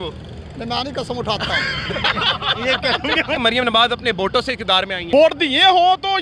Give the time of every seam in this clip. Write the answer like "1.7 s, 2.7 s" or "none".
3.4 s, 5.0 s